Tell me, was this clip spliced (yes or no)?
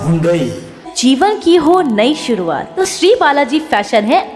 yes